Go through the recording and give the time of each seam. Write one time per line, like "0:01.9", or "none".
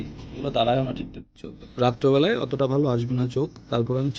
0:01.4